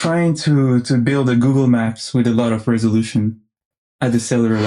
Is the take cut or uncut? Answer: uncut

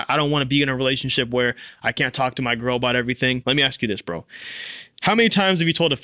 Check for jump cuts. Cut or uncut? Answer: cut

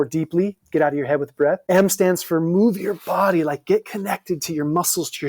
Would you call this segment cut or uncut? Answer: cut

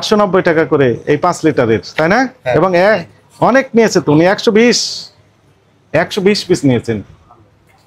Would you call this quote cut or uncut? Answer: uncut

